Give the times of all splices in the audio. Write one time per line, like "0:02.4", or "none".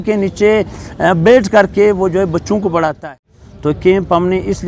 0:03.1